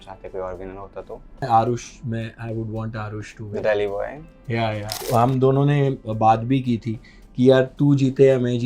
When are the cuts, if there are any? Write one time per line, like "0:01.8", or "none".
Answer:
0:01.4
0:04.9